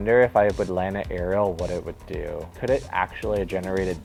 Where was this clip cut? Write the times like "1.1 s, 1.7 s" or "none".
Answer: none